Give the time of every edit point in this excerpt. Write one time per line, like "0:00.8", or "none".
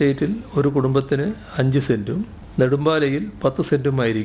0:02.4